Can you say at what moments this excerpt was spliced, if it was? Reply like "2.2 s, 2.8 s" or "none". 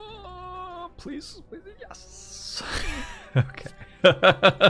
none